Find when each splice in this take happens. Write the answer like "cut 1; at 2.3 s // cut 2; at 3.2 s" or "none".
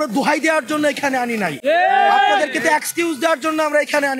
none